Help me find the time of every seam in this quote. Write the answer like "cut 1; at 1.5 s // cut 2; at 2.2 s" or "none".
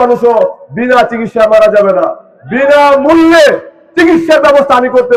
none